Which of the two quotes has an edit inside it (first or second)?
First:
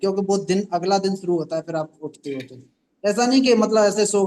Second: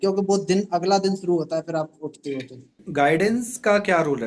second